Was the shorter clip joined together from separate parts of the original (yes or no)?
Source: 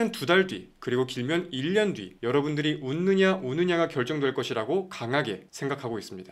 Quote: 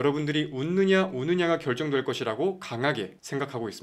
no